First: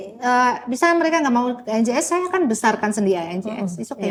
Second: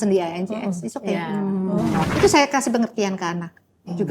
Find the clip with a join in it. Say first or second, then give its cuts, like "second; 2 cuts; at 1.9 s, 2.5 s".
second; 1 cut; at 2.1 s